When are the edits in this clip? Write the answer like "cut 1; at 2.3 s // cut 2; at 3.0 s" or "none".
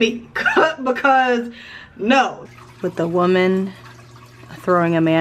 cut 1; at 2.4 s